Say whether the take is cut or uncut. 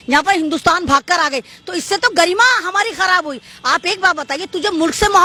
uncut